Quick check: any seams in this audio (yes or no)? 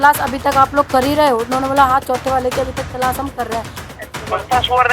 yes